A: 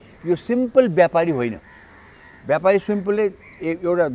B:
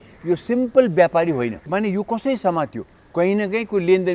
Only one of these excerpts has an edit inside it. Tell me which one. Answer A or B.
B